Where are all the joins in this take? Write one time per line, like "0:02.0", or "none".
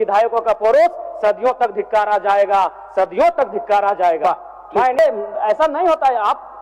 0:05.0